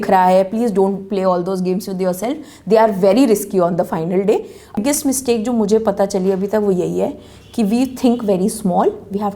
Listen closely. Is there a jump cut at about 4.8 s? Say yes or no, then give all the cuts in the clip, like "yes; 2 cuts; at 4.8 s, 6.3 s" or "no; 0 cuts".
yes; 1 cut; at 4.8 s